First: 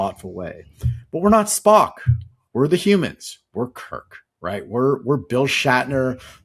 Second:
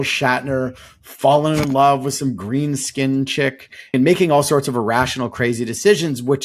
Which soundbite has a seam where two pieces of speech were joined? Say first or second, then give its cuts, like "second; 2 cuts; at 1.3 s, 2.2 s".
second; 1 cut; at 3.9 s